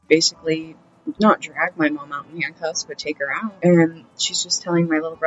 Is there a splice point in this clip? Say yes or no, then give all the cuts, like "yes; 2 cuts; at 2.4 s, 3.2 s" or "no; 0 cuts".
yes; 1 cut; at 3.6 s